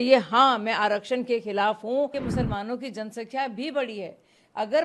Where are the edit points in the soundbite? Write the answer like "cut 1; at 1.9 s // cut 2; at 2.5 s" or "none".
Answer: cut 1; at 2.1 s